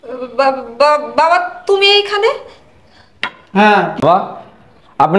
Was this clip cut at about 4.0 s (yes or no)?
yes